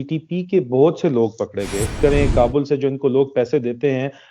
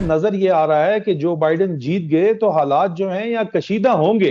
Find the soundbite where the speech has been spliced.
first; 1 cut; at 1.9 s

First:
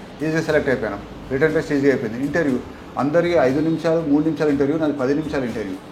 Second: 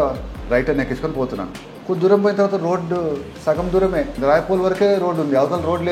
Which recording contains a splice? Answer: second; 2 cuts; at 3.3 s, 4.2 s

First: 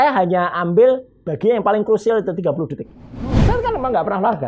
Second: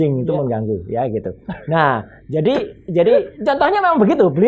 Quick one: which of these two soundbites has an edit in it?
first; 1 cut; at 3.4 s

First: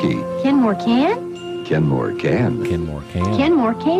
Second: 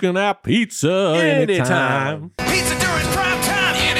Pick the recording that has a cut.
second; 1 cut; at 2.4 s

